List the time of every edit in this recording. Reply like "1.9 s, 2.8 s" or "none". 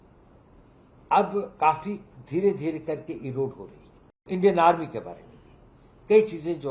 4.2 s